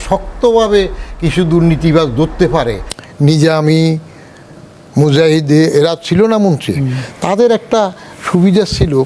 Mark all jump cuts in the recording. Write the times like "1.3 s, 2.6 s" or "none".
2.8 s